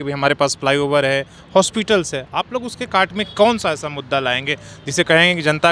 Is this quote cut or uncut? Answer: uncut